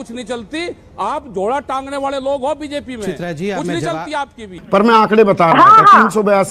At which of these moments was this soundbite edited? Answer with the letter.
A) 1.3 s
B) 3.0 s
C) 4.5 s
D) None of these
C